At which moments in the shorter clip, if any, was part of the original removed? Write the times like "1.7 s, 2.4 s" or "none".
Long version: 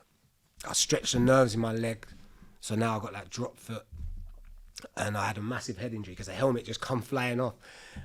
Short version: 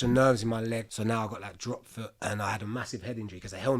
0.9 s, 2.1 s